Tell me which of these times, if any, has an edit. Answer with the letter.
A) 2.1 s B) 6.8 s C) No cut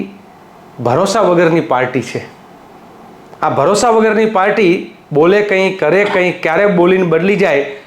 C